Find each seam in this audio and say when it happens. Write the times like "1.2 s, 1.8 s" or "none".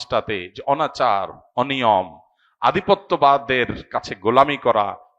none